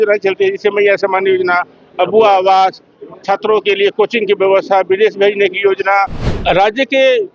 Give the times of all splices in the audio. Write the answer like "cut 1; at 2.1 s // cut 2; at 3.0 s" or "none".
cut 1; at 6.3 s

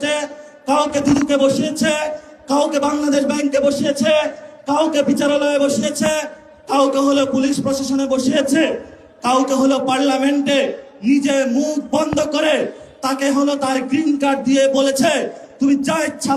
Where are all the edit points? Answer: none

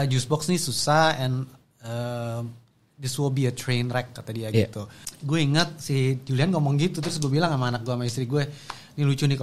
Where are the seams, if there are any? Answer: cut 1; at 4.9 s

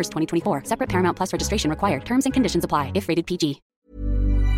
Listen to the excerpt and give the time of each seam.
cut 1; at 3.7 s

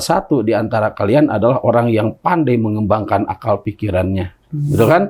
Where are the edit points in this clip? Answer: none

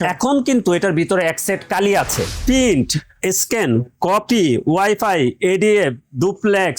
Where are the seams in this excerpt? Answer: cut 1; at 2.4 s

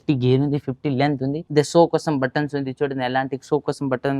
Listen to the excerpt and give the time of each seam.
cut 1; at 1.4 s

